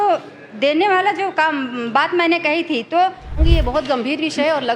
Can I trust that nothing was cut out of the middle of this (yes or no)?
no